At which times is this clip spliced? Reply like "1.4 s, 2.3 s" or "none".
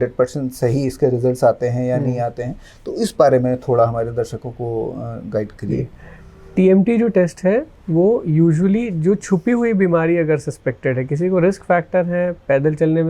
none